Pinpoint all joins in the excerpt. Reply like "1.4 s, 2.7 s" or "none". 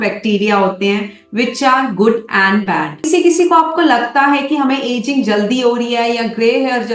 3.1 s